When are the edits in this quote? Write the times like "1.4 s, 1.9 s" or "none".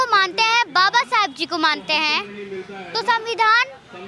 none